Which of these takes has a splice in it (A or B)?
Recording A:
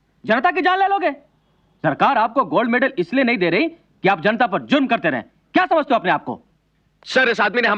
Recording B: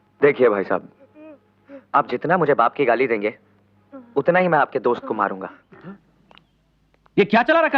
B